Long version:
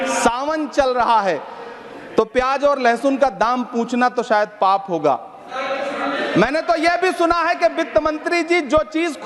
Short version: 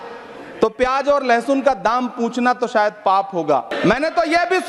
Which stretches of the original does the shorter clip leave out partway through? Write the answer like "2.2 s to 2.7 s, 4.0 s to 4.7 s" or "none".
5.3 s to 6.2 s